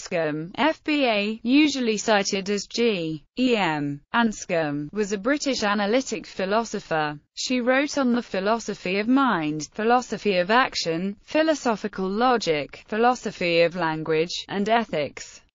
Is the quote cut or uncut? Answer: uncut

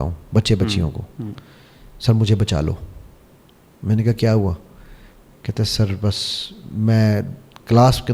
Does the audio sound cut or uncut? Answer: uncut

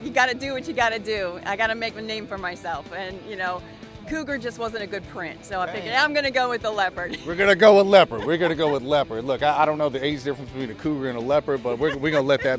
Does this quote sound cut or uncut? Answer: uncut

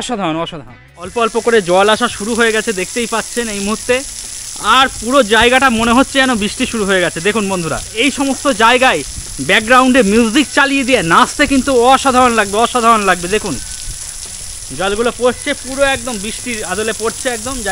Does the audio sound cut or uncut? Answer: cut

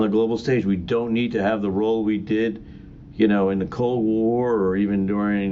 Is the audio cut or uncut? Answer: uncut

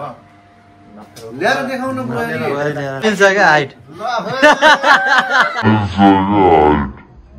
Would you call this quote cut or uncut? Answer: cut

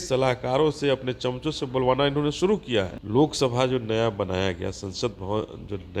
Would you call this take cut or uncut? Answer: cut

